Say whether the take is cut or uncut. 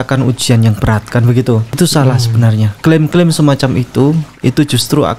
cut